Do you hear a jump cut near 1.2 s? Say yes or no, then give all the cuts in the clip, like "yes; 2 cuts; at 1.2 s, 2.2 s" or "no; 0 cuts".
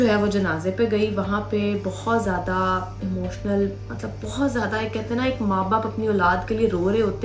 no; 0 cuts